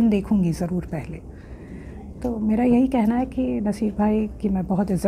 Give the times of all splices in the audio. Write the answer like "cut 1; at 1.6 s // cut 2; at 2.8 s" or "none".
none